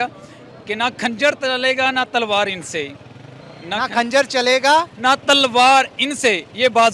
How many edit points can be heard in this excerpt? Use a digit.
0